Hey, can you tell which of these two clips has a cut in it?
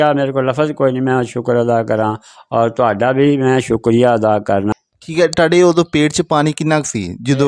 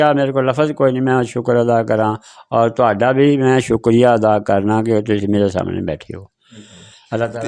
first; 1 cut; at 4.7 s

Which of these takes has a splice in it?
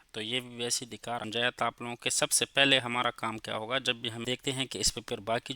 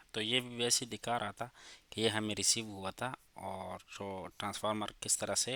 first; 2 cuts; at 1.2 s, 4.2 s

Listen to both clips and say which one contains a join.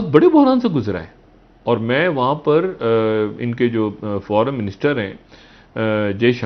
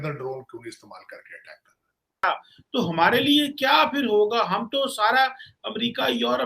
second; 1 cut; at 2.1 s

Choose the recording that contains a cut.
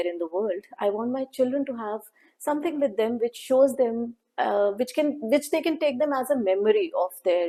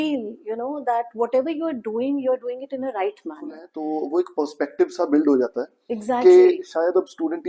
second; 1 cut; at 3.7 s

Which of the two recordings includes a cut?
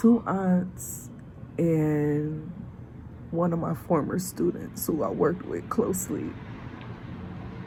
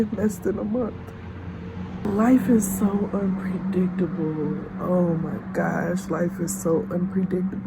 second; 1 cut; at 2.1 s

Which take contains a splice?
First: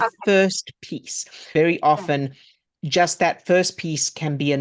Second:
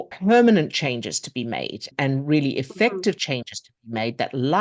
first; 1 cut; at 1.5 s

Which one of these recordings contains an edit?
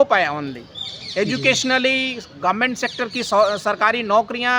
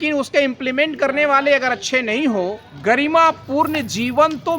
second; 1 cut; at 2.7 s

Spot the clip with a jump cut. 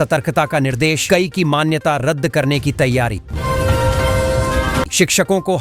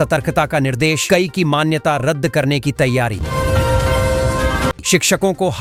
first; 2 cuts; at 3.2 s, 4.9 s

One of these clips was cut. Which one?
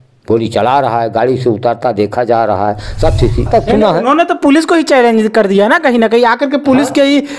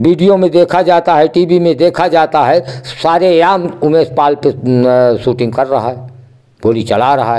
first; 1 cut; at 3.5 s

